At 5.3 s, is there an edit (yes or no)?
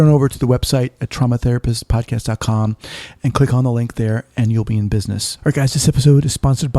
yes